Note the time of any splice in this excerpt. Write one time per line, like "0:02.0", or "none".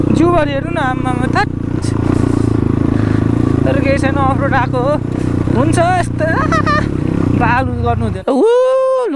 0:08.1